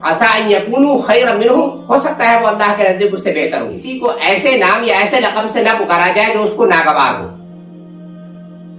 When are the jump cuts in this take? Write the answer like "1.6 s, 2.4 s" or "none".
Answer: 3.8 s